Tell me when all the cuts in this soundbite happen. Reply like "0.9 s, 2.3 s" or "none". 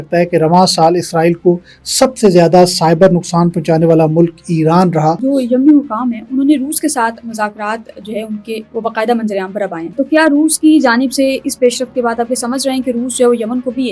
5.2 s, 9.9 s